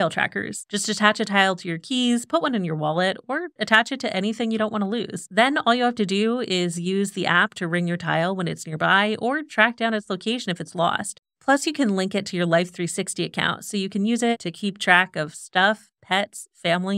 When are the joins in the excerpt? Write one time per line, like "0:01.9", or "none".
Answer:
0:05.2
0:11.1